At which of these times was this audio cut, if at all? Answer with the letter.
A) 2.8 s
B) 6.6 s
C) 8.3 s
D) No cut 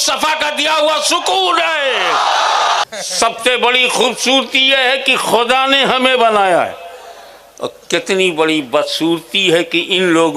A